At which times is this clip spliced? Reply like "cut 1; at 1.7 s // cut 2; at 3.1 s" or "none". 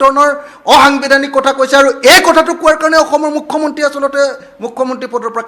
none